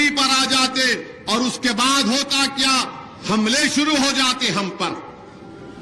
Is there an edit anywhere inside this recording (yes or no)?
no